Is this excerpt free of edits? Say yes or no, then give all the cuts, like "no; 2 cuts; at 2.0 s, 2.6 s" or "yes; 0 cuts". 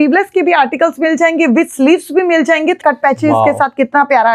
no; 1 cut; at 2.8 s